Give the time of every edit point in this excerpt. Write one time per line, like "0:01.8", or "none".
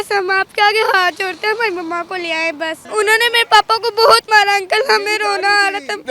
0:02.7

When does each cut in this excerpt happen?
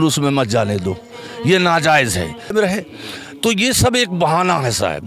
0:02.5

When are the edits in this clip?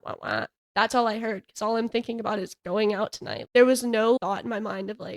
0:04.2

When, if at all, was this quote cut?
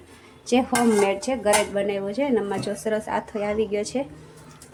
none

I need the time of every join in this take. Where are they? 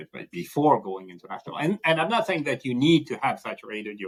none

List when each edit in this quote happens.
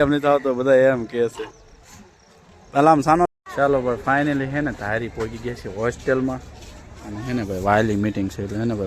0:03.3

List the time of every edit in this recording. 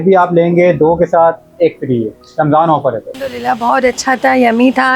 0:03.2

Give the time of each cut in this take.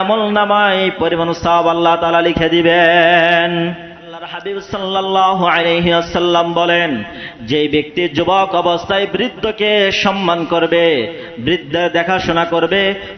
0:04.5

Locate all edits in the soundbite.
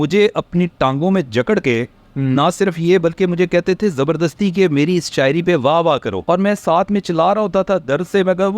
0:06.1

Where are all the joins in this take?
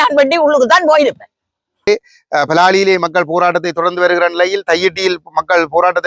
0:01.9

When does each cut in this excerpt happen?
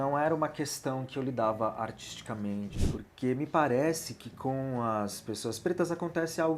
0:02.9

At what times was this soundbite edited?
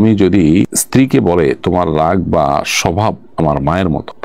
none

